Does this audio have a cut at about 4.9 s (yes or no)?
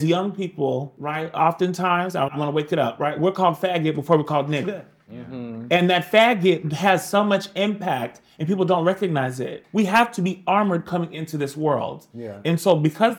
no